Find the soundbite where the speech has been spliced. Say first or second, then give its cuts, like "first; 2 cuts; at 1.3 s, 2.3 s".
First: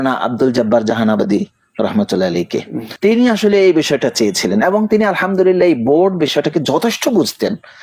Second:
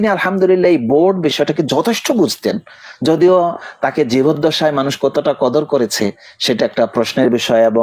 first; 1 cut; at 2.8 s